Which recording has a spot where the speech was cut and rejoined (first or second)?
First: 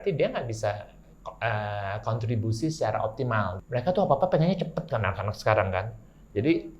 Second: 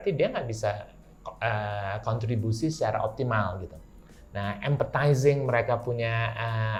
first